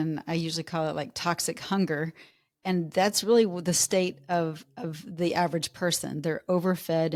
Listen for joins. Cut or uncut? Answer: uncut